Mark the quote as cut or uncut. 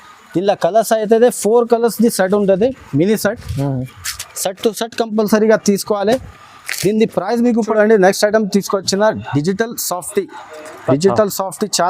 cut